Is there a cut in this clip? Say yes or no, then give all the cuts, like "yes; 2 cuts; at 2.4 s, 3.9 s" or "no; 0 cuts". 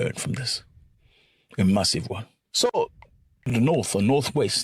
yes; 1 cut; at 3.5 s